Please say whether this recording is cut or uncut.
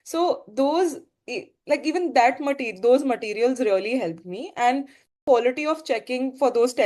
cut